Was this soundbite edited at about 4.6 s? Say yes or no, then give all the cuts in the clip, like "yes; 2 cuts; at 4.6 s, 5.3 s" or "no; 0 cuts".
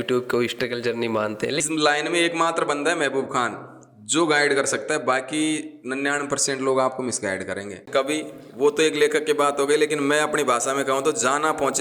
no; 2 cuts; at 1.6 s, 7.9 s